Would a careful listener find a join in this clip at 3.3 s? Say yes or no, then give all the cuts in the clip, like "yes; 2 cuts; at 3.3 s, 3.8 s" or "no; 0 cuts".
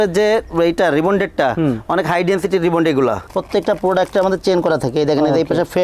yes; 1 cut; at 3.3 s